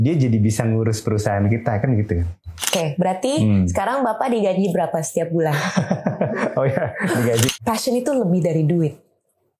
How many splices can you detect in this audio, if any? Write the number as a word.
two